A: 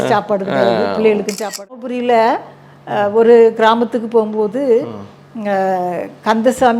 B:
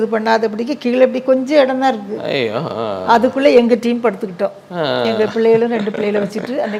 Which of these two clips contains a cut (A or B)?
A